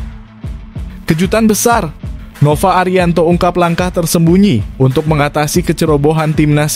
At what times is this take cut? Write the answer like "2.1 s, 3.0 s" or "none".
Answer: 1.1 s